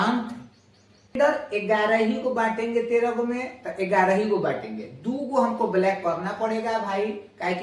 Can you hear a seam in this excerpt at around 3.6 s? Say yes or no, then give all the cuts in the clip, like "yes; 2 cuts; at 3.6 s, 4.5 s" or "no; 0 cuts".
no; 1 cut; at 1.2 s